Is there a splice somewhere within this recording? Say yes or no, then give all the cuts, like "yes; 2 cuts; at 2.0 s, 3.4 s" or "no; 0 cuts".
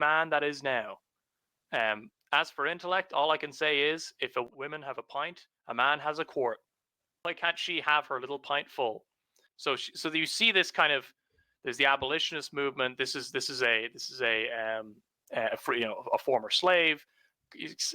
yes; 3 cuts; at 4.4 s, 7.2 s, 9.5 s